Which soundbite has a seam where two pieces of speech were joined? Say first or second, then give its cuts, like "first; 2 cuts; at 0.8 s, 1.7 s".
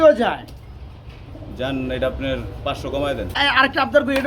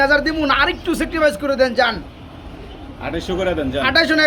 first; 1 cut; at 3.3 s